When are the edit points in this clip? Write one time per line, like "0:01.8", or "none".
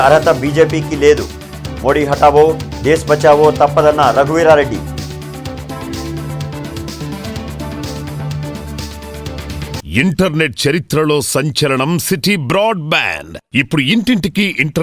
0:09.9